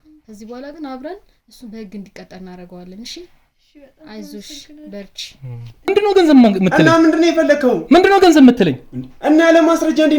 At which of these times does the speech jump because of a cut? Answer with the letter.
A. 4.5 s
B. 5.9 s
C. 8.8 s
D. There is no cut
B